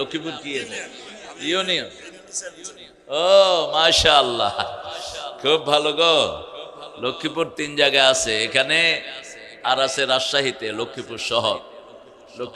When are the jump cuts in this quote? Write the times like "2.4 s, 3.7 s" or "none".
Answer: none